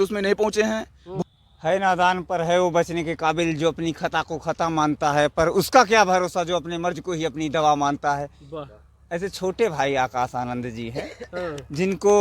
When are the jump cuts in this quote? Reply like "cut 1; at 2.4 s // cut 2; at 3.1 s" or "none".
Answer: cut 1; at 1.0 s